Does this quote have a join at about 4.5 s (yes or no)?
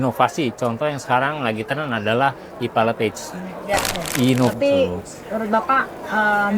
yes